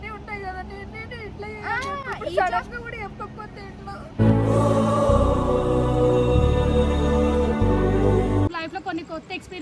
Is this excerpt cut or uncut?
cut